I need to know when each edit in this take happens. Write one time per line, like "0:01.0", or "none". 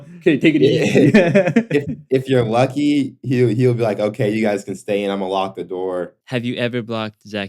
0:06.2